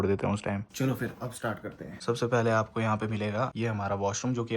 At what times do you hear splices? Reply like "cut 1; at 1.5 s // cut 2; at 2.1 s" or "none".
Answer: cut 1; at 0.7 s // cut 2; at 2.0 s // cut 3; at 3.5 s